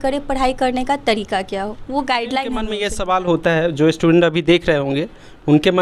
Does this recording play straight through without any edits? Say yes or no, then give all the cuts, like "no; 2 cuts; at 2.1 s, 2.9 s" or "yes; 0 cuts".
no; 1 cut; at 2.8 s